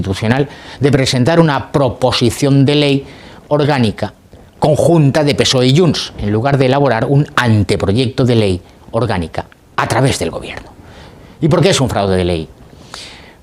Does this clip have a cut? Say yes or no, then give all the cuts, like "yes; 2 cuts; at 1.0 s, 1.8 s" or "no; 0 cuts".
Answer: no; 0 cuts